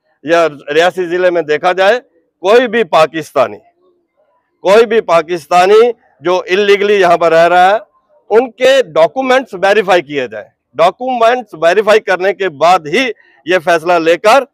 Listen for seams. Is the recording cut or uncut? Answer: uncut